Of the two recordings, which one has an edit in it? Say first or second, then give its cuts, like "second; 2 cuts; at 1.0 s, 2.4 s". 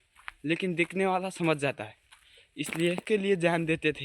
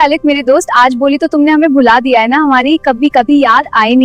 first; 1 cut; at 3.0 s